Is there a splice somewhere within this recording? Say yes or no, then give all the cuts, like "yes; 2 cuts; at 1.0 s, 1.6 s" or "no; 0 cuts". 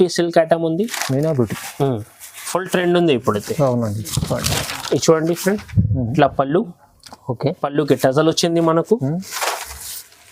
no; 0 cuts